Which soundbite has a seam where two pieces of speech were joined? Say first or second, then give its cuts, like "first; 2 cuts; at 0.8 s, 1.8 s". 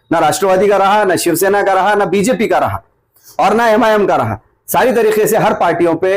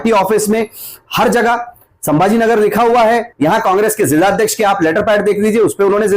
second; 1 cut; at 3.3 s